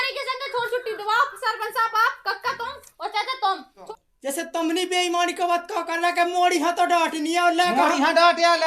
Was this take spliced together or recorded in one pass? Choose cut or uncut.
cut